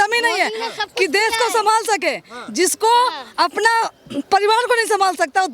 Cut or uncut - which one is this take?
uncut